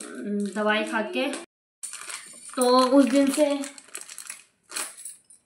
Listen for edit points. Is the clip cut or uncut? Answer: cut